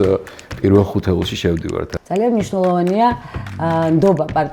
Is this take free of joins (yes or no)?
no